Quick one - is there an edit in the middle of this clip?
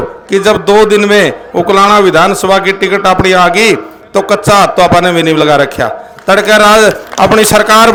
no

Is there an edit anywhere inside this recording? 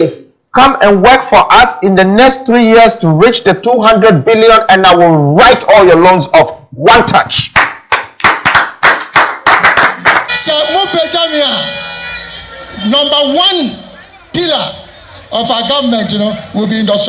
yes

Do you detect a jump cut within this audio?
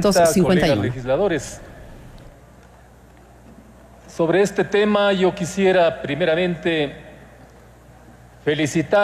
no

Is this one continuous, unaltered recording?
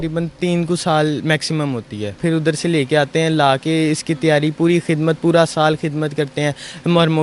yes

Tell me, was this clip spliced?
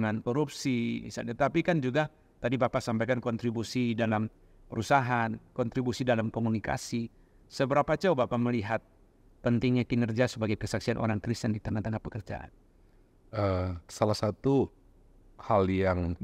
no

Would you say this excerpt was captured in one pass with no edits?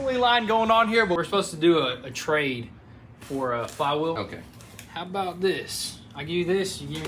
no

